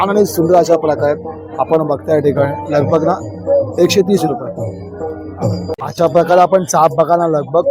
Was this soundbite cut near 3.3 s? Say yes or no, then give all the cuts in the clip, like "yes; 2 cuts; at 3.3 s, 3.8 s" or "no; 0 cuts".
no; 1 cut; at 5.9 s